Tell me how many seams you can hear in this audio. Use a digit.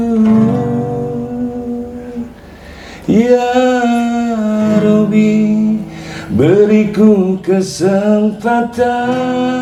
0